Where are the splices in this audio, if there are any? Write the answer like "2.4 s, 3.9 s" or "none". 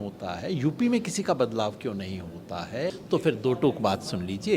3.0 s